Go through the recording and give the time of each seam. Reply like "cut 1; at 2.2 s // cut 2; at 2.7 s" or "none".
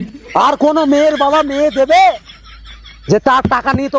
none